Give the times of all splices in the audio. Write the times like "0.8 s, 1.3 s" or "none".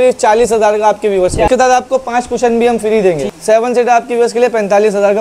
1.5 s, 3.3 s